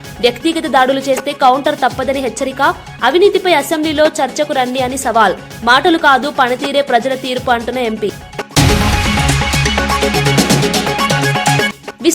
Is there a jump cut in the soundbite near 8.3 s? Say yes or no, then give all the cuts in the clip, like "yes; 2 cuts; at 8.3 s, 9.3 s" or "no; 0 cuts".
yes; 1 cut; at 8.3 s